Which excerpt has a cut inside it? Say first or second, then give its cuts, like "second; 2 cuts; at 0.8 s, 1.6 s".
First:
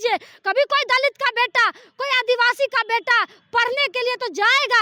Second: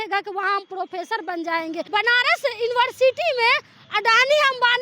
second; 1 cut; at 1.8 s